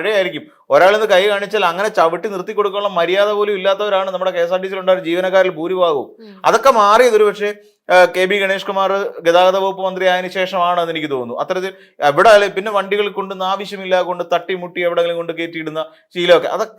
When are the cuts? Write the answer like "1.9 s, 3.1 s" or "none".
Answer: none